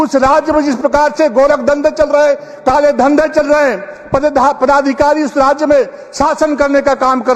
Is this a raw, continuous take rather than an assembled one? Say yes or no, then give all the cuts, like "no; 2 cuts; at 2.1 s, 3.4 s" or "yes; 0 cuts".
yes; 0 cuts